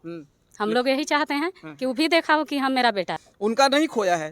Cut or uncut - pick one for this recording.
cut